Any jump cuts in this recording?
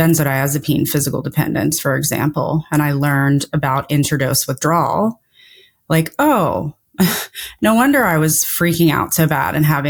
no; 0 cuts

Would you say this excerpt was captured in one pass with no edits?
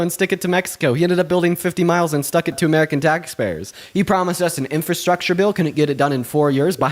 no; 1 cut; at 2.6 s

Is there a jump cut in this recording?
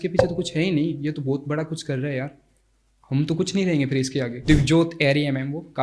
yes; 1 cut; at 4.4 s

